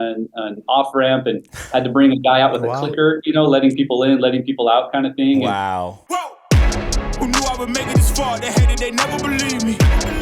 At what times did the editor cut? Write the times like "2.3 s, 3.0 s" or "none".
6.0 s